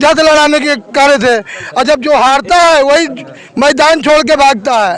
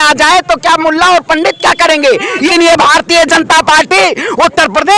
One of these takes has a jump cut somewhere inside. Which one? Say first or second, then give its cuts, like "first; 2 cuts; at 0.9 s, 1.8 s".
second; 1 cut; at 2.5 s